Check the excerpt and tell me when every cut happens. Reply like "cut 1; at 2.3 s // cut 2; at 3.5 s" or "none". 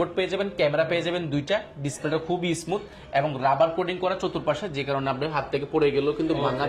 none